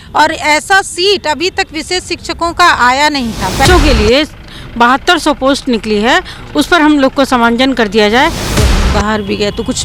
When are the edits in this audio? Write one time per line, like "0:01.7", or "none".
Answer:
0:03.7
0:08.5